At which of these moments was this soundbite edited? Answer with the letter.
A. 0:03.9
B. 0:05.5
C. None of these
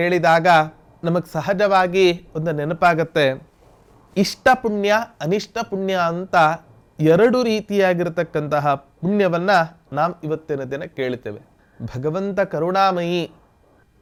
C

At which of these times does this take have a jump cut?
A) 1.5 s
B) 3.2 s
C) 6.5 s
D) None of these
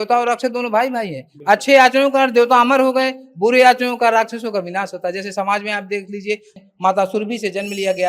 C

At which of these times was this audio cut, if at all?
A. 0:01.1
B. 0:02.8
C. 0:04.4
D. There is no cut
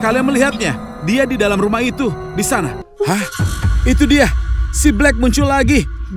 B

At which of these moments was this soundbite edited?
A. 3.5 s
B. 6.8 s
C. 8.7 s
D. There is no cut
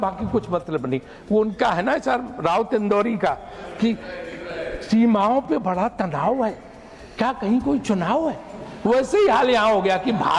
D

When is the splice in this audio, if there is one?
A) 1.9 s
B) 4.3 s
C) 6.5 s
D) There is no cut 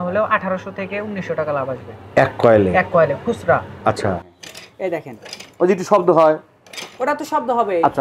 B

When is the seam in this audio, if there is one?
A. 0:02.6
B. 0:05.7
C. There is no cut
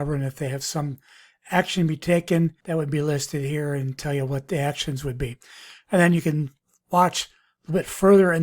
A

